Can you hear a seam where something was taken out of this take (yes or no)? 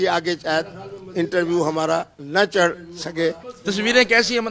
yes